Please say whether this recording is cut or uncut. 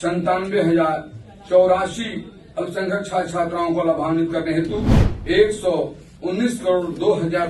uncut